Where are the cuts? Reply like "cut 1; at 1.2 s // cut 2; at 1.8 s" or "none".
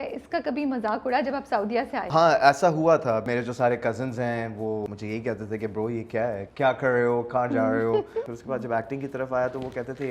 cut 1; at 2.1 s // cut 2; at 3.2 s // cut 3; at 4.9 s // cut 4; at 6.4 s // cut 5; at 8.3 s